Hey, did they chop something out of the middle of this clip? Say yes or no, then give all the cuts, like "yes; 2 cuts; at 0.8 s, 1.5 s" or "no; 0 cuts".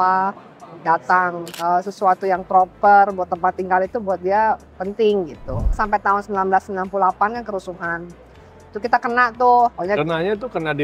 yes; 2 cuts; at 1.5 s, 5.8 s